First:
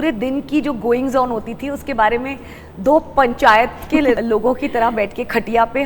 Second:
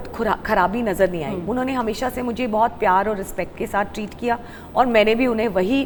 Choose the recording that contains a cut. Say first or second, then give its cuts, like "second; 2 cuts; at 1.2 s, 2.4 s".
first; 1 cut; at 4.2 s